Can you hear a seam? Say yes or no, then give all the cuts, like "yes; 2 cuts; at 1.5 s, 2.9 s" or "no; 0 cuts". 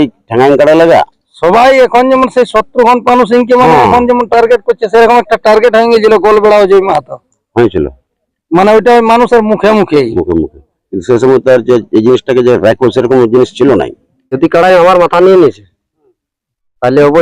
yes; 1 cut; at 14.3 s